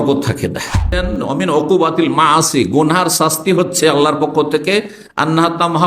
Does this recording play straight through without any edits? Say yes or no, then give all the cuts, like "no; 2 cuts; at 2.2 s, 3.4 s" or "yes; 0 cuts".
no; 1 cut; at 1.0 s